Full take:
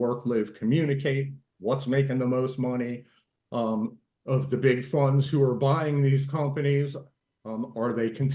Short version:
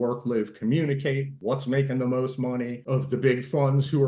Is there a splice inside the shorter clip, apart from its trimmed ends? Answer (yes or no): yes